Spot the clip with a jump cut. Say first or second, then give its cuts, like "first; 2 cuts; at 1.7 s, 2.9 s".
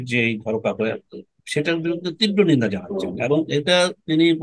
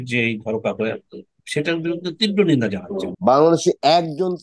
second; 1 cut; at 3.1 s